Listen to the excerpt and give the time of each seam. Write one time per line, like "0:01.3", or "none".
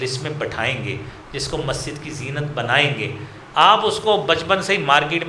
none